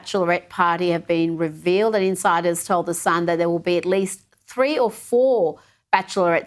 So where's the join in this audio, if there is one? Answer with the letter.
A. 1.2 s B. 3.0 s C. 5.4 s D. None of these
D